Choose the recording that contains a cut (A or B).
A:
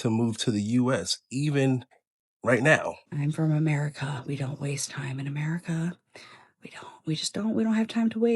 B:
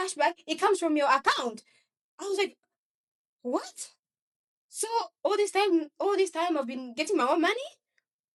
A